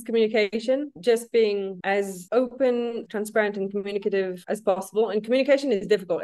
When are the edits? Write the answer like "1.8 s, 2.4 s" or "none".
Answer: 0.9 s